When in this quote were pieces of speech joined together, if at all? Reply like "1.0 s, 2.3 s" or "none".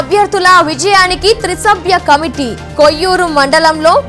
none

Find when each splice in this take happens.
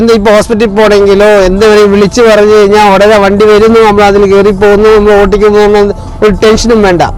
none

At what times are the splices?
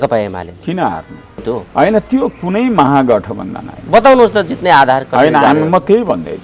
1.6 s

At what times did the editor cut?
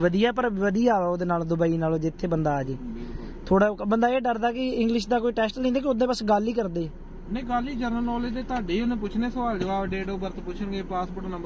none

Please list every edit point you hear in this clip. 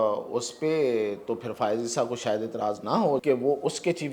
3.2 s

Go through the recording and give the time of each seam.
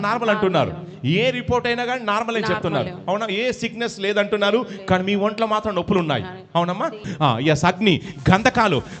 7.1 s

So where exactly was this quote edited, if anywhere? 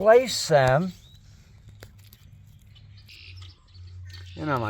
3.1 s

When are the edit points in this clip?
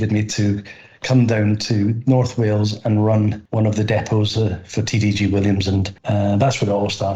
3.4 s, 6.0 s

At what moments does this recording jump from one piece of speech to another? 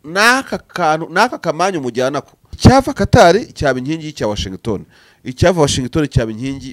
2.6 s

